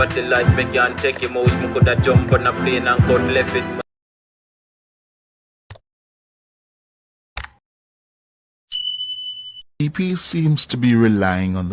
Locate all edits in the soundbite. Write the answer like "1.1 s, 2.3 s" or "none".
9.8 s